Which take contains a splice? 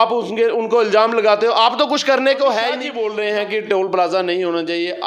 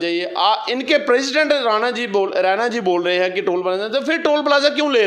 first; 1 cut; at 2.9 s

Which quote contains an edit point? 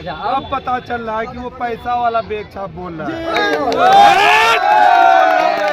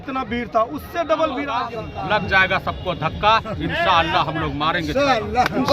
second; 1 cut; at 1.7 s

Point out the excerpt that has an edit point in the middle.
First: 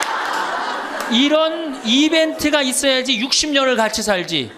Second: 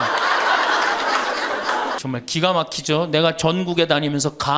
second; 1 cut; at 2.0 s

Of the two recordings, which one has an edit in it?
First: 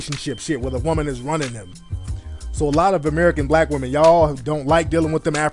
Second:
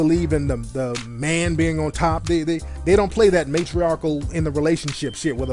first; 1 cut; at 2.1 s

